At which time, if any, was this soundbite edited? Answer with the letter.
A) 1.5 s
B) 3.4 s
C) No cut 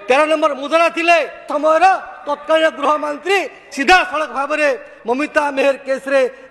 A